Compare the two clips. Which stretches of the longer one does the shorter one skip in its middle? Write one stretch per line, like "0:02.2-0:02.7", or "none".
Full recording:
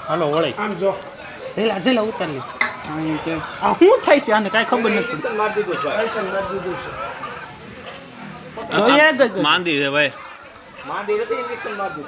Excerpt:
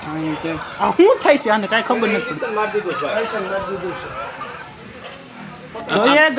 none